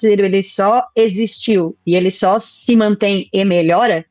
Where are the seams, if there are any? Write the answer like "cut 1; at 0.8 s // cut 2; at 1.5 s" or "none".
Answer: none